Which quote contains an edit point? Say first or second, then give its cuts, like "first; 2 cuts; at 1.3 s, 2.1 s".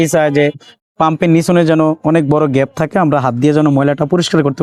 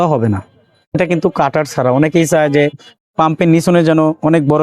second; 1 cut; at 0.9 s